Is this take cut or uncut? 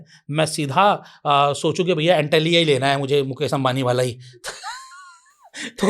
uncut